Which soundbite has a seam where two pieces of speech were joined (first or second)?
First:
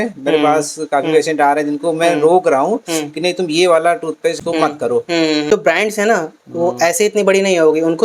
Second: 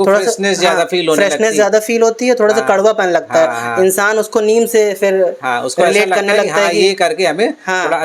first